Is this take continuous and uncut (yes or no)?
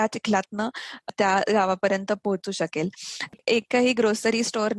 no